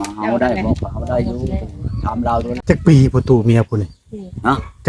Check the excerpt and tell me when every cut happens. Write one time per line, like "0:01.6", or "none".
0:02.6